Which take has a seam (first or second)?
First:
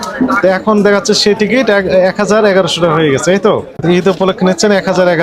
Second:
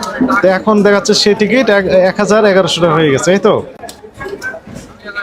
first